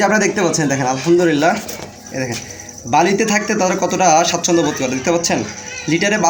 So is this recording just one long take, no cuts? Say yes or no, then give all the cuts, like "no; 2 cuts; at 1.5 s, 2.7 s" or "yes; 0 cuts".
yes; 0 cuts